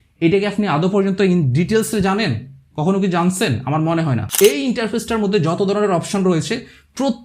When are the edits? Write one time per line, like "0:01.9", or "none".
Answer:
0:04.3